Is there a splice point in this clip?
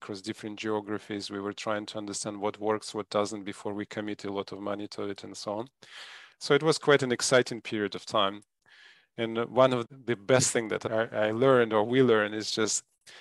yes; 2 cuts; at 9.8 s, 10.8 s

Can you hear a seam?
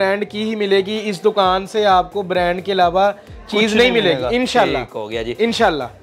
no; 0 cuts

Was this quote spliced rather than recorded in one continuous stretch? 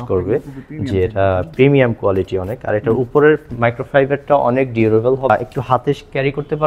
yes; 1 cut; at 5.3 s

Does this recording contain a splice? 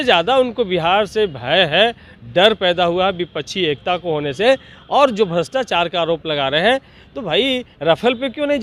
no; 0 cuts

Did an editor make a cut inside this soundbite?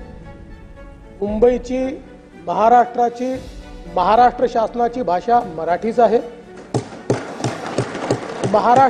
no; 0 cuts

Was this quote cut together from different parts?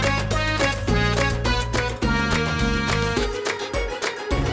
no; 0 cuts

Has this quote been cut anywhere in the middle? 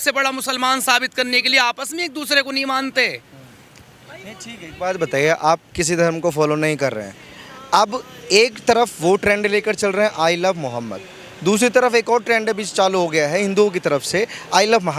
no; 0 cuts

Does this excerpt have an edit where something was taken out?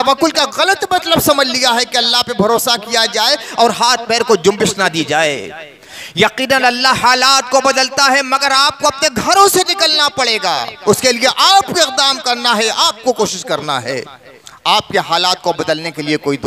no; 0 cuts

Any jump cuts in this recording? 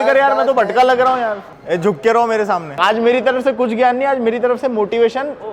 yes; 2 cuts; at 1.5 s, 2.7 s

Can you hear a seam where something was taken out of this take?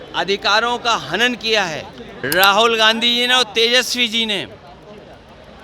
yes; 1 cut; at 2.1 s

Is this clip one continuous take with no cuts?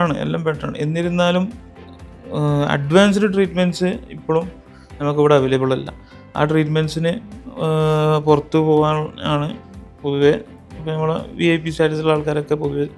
yes; 0 cuts

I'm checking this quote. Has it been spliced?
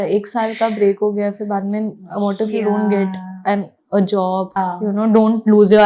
yes; 1 cut; at 4.6 s

